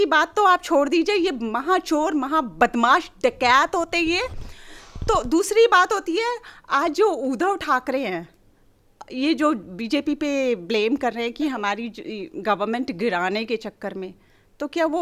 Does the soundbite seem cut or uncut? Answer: uncut